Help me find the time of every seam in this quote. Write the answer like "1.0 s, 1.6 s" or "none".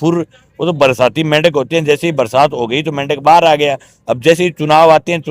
none